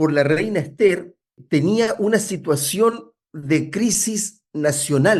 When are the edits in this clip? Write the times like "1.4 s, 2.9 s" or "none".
none